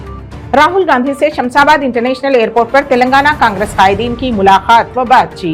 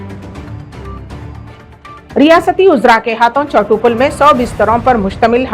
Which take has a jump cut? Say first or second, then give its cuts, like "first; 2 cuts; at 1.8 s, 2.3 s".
second; 1 cut; at 0.9 s